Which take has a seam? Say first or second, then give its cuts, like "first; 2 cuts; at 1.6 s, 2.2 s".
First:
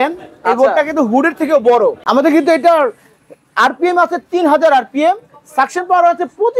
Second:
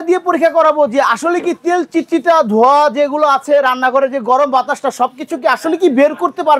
first; 1 cut; at 2.0 s